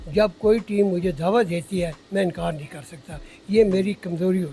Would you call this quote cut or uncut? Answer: uncut